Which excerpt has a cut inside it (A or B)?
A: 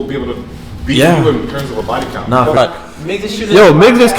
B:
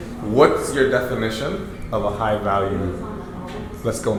A